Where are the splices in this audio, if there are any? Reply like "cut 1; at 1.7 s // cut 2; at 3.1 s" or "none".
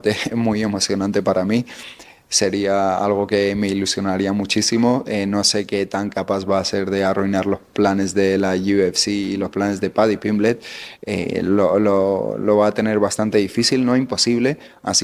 none